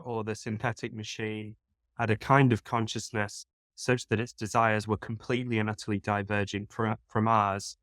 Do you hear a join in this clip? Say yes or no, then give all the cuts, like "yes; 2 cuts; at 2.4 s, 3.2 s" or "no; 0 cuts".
no; 0 cuts